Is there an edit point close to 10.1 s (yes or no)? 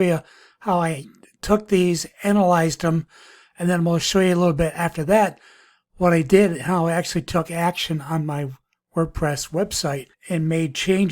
yes